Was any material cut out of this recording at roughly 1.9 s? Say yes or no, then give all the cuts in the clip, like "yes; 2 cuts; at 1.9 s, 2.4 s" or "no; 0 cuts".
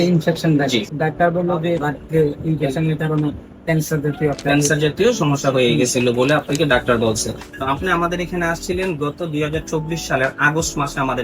yes; 3 cuts; at 0.9 s, 1.9 s, 7.5 s